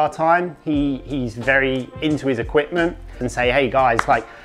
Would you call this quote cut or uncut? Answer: cut